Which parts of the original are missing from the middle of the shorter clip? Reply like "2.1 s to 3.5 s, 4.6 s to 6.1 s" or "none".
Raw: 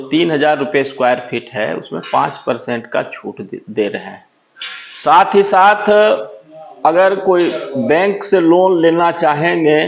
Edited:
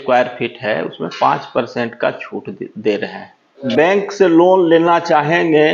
4.5 s to 7.7 s